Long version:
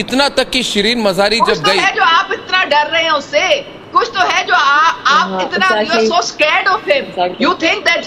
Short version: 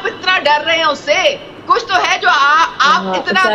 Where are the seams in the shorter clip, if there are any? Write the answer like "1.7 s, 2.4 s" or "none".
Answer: none